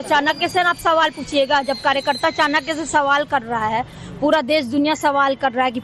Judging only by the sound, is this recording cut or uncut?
uncut